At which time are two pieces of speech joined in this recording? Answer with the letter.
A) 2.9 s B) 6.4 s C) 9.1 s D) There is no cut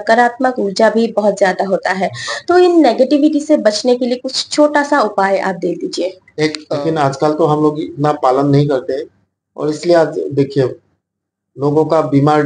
B